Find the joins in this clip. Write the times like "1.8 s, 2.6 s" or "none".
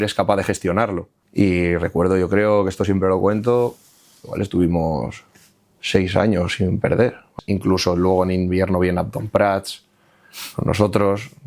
1.1 s, 7.3 s